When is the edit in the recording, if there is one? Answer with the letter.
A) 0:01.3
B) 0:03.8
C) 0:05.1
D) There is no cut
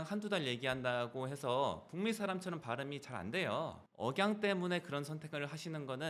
B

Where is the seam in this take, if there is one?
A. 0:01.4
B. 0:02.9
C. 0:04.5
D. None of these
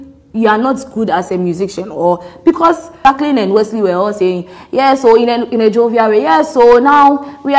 B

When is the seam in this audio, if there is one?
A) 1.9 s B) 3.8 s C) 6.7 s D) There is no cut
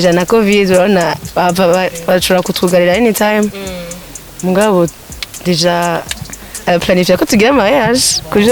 D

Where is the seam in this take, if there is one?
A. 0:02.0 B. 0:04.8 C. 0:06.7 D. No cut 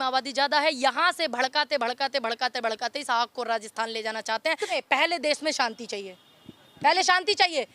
B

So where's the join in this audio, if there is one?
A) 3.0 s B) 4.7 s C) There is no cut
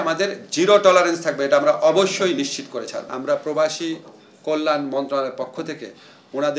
A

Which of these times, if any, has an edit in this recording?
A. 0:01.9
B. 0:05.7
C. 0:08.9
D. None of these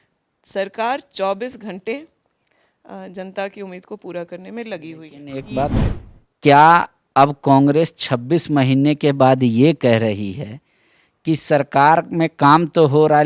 B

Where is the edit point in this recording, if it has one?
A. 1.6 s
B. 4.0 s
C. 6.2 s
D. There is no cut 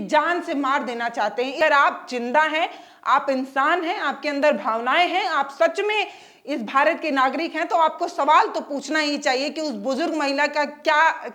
A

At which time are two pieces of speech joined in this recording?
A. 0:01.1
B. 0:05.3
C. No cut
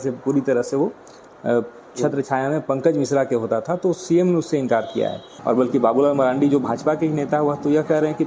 B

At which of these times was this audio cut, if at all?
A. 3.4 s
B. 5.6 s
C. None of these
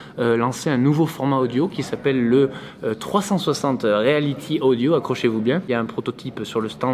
B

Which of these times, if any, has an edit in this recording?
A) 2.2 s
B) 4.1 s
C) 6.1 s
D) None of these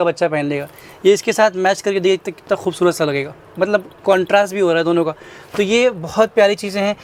D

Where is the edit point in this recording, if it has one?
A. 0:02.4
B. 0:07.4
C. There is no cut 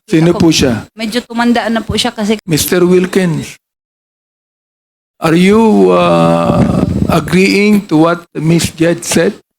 A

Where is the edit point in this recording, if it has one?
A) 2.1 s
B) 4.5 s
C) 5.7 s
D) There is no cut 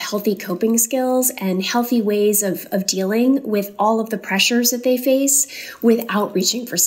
D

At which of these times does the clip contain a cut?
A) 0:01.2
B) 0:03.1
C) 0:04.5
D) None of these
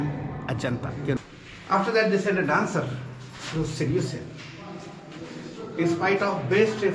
A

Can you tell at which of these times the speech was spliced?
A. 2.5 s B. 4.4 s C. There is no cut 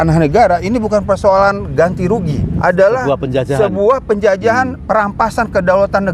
A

